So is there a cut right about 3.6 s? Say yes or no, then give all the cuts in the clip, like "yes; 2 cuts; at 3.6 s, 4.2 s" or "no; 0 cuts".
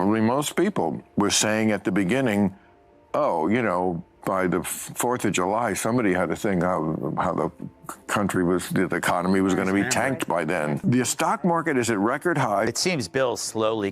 no; 1 cut; at 12.8 s